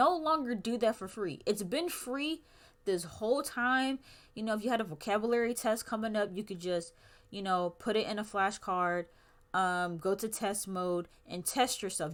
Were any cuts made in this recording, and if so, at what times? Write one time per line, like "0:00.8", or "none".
none